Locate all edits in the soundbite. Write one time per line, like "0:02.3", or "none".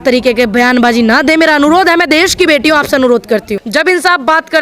0:03.6